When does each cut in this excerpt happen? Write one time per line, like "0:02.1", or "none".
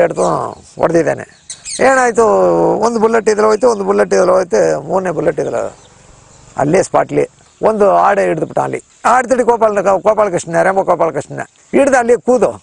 0:01.5
0:07.4